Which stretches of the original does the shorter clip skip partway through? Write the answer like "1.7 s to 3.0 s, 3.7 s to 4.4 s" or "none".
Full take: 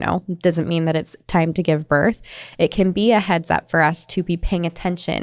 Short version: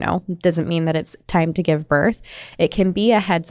none